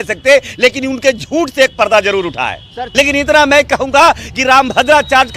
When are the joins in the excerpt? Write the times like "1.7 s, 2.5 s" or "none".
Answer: 2.8 s